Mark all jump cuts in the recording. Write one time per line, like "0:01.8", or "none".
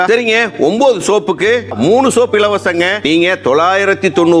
0:01.7